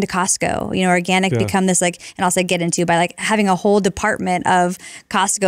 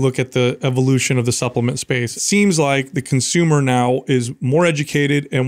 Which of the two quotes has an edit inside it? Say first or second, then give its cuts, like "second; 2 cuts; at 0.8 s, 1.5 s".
second; 1 cut; at 2.2 s